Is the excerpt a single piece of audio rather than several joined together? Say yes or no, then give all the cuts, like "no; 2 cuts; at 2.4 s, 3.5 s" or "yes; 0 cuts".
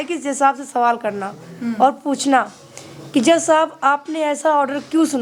yes; 0 cuts